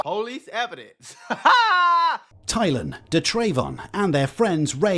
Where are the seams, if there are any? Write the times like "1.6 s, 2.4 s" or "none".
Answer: 2.3 s